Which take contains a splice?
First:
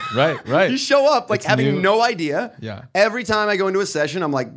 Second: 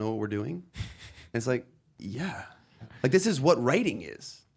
second; 1 cut; at 2.9 s

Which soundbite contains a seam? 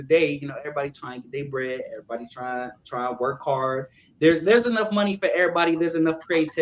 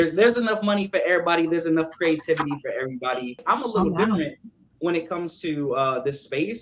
second; 1 cut; at 3.5 s

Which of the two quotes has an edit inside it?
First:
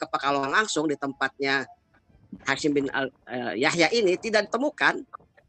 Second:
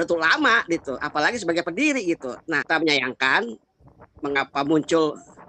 second; 1 cut; at 2.6 s

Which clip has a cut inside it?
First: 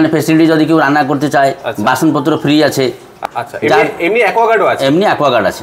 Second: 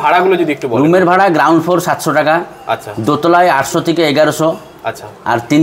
first; 1 cut; at 3.2 s

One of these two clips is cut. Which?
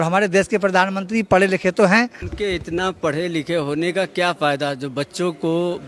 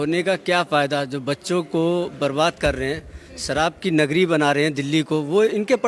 first; 1 cut; at 2.2 s

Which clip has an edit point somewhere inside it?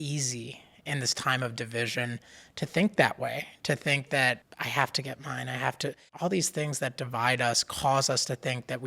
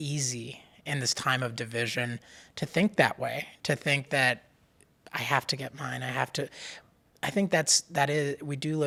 first; 2 cuts; at 4.5 s, 6.0 s

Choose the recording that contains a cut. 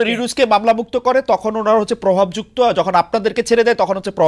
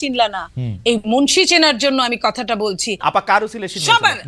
second; 1 cut; at 3.0 s

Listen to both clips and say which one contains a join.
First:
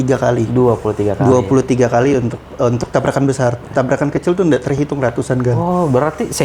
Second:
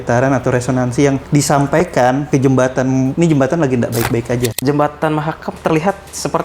second; 4 cuts; at 1.2 s, 2.2 s, 3.1 s, 4.6 s

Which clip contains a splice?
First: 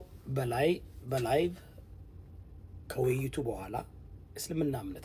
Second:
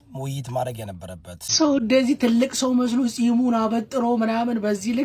second; 1 cut; at 1.5 s

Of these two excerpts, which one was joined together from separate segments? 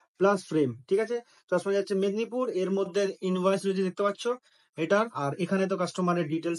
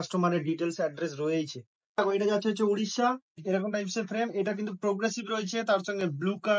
second; 2 cuts; at 2.0 s, 3.3 s

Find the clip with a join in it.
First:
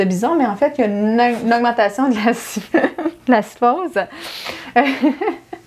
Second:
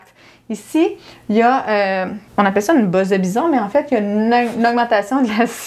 second; 1 cut; at 2.2 s

